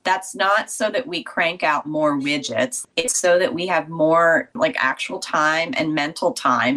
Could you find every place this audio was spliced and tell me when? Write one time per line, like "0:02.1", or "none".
0:02.8
0:04.6